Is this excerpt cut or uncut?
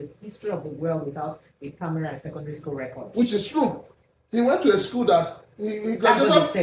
uncut